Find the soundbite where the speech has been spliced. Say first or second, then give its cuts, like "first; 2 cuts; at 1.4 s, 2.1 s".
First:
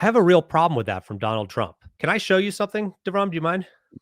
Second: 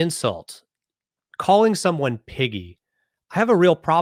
first; 1 cut; at 1.8 s